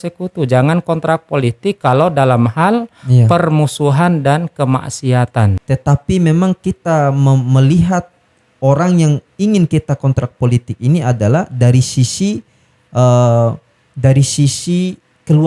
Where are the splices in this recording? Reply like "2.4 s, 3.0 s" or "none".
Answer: 5.6 s